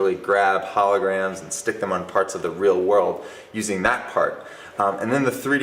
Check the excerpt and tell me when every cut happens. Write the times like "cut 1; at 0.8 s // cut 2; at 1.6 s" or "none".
cut 1; at 3.0 s